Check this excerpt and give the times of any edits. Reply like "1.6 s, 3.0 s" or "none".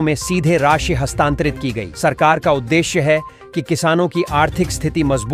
none